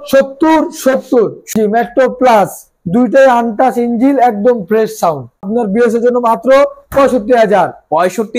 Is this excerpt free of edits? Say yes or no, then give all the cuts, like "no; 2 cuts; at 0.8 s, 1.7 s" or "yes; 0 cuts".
no; 2 cuts; at 1.4 s, 5.5 s